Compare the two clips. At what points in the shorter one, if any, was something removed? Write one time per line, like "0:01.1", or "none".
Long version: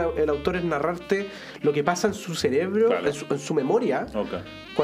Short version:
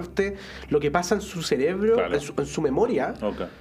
none